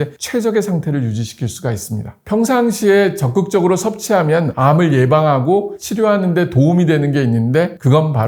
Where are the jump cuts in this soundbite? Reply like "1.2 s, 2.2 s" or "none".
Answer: none